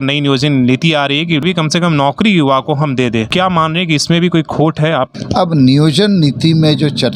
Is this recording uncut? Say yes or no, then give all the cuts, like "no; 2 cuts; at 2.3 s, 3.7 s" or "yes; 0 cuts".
no; 3 cuts; at 1.4 s, 3.3 s, 5.2 s